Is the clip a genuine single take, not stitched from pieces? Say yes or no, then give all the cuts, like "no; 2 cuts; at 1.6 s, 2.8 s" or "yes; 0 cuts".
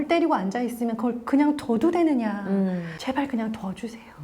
no; 1 cut; at 2.9 s